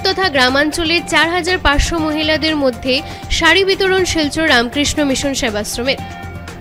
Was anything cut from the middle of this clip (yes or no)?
no